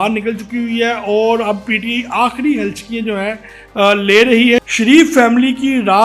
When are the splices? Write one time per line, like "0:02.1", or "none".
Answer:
0:04.6